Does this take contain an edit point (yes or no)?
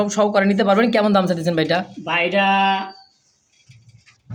no